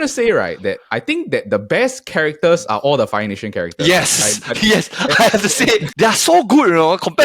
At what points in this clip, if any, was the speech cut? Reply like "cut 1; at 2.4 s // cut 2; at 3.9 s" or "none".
cut 1; at 5.9 s